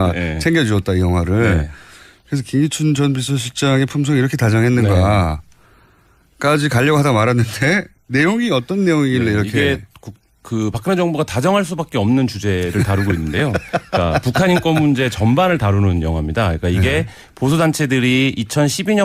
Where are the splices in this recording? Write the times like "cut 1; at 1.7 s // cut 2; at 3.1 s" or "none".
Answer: cut 1; at 12.2 s